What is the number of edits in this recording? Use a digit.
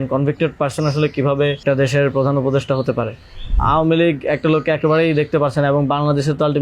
2